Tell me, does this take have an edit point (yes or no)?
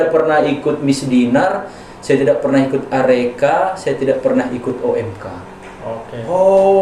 no